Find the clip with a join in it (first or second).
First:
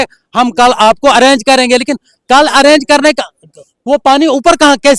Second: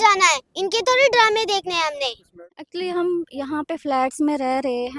second